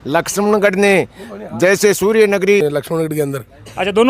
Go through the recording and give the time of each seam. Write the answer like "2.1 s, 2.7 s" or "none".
2.6 s